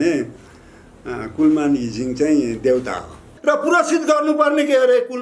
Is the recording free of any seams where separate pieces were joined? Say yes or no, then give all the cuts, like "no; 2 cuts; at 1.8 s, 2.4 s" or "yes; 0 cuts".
no; 1 cut; at 3.3 s